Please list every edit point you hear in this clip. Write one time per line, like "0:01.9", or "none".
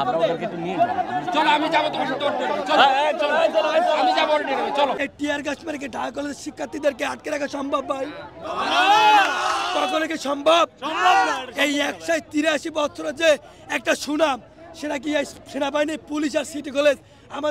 0:05.0